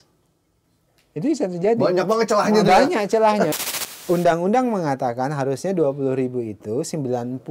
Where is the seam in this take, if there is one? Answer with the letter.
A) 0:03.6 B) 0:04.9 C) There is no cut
A